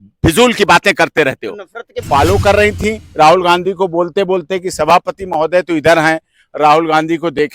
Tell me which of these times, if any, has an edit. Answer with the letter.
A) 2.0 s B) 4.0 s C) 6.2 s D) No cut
A